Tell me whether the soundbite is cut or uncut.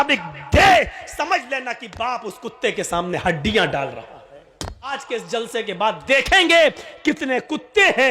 cut